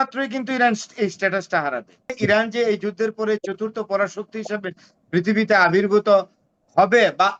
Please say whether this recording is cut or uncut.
cut